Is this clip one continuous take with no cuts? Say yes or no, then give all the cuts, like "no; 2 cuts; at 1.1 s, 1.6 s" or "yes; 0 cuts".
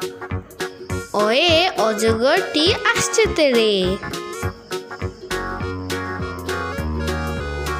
no; 2 cuts; at 1.1 s, 4.0 s